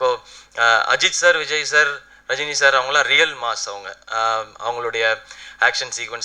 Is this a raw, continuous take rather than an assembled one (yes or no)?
yes